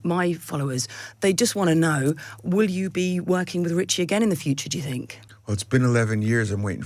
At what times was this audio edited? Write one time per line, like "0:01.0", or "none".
none